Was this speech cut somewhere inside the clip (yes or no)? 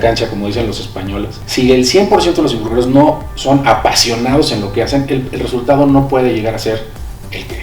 yes